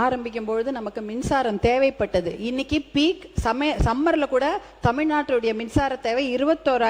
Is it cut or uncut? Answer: uncut